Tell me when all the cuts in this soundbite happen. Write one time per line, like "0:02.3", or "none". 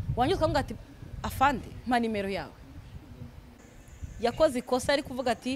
0:03.6